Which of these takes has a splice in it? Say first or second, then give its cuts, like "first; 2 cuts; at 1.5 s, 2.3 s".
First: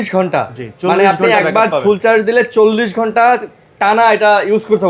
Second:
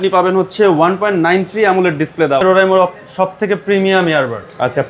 second; 1 cut; at 2.4 s